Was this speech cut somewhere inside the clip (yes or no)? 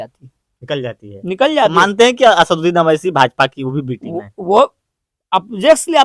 no